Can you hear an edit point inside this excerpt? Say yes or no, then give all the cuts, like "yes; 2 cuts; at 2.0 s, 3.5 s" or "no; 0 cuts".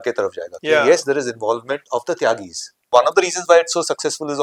yes; 1 cut; at 2.8 s